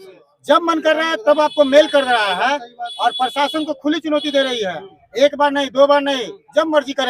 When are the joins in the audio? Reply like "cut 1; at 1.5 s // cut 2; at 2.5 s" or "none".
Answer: none